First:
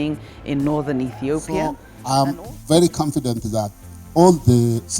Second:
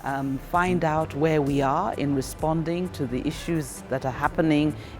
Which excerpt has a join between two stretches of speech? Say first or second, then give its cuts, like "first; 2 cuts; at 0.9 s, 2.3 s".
first; 1 cut; at 1.9 s